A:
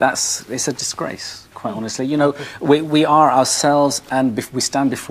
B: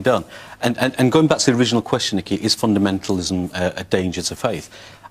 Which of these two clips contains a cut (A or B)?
B